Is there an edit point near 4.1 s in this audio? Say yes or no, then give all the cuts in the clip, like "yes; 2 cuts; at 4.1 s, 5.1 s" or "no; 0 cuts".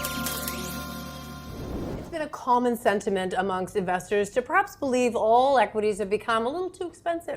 no; 1 cut; at 2.1 s